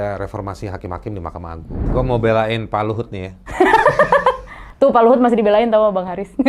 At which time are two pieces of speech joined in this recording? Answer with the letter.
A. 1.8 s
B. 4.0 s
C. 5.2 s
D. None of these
A